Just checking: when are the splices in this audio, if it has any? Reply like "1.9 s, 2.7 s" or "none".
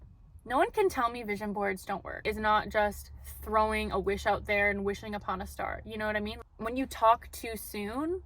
2.2 s, 6.4 s